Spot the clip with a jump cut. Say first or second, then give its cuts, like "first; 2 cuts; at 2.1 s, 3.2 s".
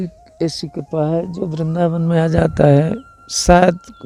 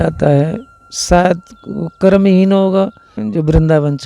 second; 1 cut; at 3.1 s